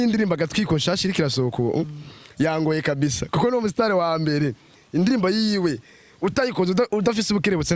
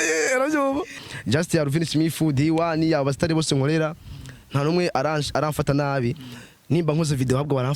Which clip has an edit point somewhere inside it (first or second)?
second